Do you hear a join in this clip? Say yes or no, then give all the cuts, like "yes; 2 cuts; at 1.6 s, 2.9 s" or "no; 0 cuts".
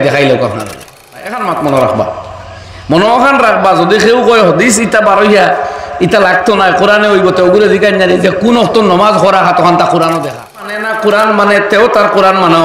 yes; 2 cuts; at 1.4 s, 10.9 s